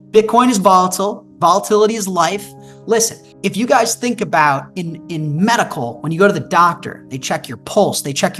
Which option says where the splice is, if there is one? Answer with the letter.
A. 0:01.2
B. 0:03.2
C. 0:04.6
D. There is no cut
B